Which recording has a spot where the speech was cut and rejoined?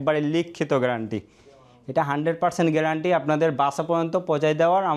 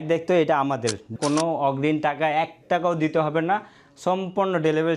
second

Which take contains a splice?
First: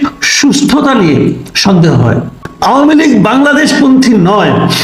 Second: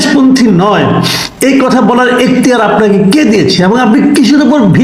first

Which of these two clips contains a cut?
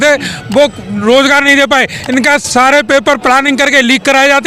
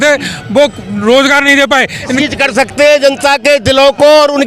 second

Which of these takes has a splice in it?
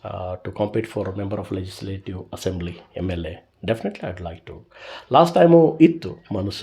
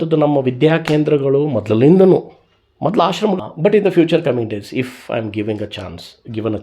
second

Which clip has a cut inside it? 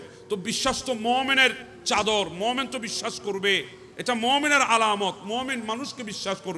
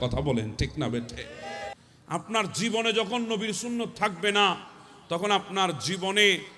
second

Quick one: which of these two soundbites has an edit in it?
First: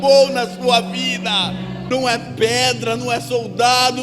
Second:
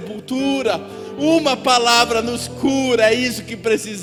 first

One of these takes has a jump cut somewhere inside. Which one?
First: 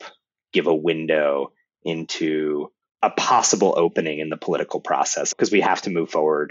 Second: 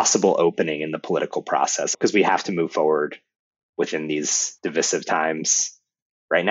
second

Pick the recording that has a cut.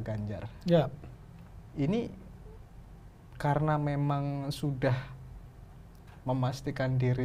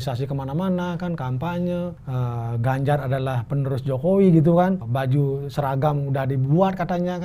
second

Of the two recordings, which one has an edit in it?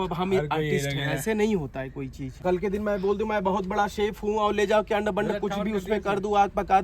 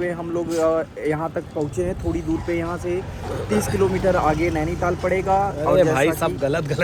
first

